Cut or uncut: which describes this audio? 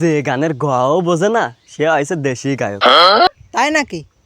cut